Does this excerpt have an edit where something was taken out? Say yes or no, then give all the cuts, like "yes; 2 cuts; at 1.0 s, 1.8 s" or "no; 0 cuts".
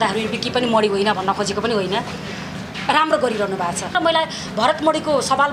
yes; 1 cut; at 3.9 s